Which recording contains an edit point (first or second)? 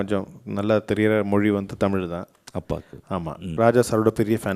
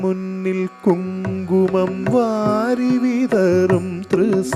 first